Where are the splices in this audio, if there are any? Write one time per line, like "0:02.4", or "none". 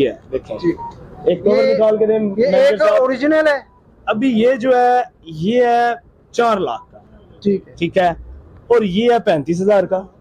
none

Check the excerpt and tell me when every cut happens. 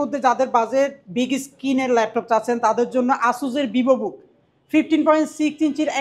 none

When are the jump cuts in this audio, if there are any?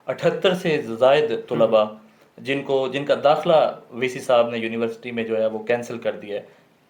none

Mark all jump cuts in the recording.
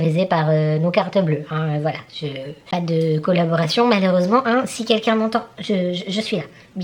none

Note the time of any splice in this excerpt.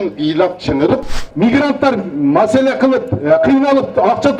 0:01.2

